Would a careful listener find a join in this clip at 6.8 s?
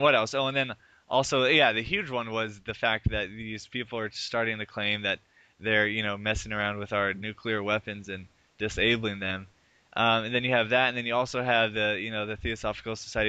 no; 1 cut; at 10.7 s

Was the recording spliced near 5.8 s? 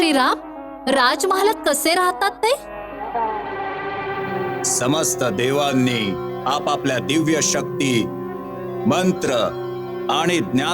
no; 1 cut; at 4.5 s

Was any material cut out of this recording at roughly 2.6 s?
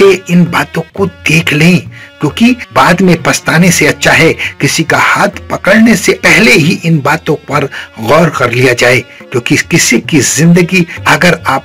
yes; 1 cut; at 2.6 s

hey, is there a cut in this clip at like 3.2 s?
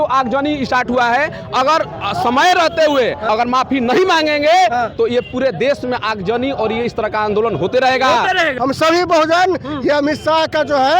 yes; 2 cuts; at 3.2 s, 8.5 s

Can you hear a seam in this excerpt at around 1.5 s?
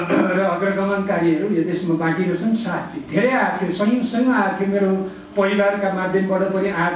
no; 1 cut; at 3.0 s

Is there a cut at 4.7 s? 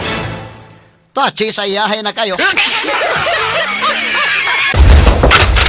yes; 1 cut; at 4.7 s

